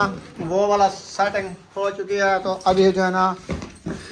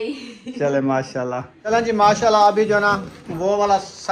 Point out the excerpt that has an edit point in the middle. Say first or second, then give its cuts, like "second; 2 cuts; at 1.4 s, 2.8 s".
second; 1 cut; at 1.5 s